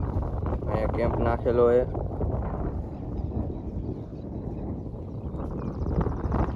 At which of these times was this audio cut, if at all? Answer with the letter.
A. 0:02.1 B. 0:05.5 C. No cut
C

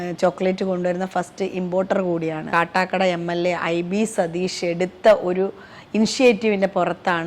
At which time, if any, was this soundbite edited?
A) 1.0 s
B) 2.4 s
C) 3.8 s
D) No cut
B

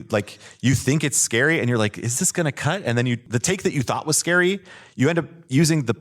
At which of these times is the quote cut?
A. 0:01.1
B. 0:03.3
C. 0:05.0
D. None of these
B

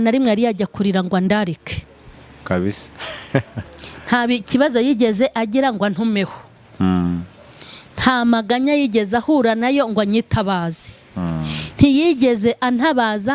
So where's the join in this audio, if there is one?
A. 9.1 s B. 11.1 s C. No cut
C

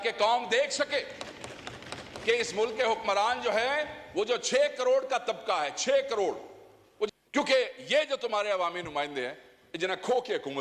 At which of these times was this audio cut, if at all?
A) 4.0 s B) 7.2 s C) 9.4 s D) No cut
B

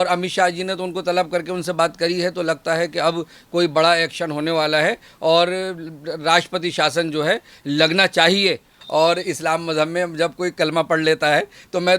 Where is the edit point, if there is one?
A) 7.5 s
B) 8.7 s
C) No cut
B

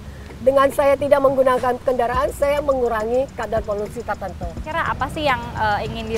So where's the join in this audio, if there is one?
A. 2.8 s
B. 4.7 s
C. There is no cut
B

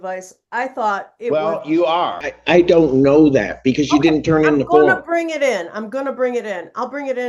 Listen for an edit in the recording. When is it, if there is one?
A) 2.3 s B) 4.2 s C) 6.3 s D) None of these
A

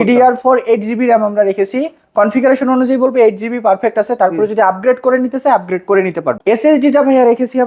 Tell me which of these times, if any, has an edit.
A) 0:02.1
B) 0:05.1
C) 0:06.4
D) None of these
C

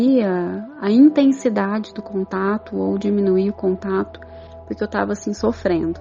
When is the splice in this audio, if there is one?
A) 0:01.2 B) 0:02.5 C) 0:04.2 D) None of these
D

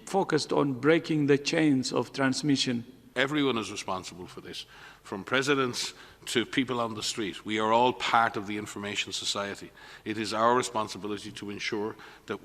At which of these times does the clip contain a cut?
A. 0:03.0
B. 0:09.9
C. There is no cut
A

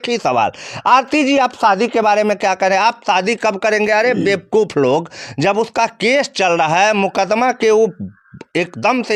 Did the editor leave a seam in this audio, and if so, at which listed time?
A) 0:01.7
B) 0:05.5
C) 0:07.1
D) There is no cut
D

